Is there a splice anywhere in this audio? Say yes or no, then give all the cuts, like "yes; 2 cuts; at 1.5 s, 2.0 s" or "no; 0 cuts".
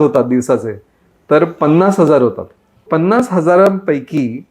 yes; 1 cut; at 2.8 s